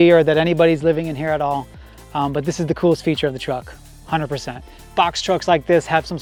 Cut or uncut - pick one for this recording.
uncut